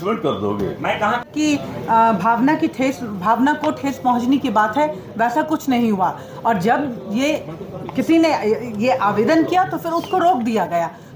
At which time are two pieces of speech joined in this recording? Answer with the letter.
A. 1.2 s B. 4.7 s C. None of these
A